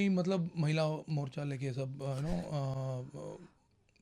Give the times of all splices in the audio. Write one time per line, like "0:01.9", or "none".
none